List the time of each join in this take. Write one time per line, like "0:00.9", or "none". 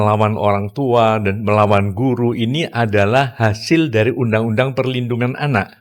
none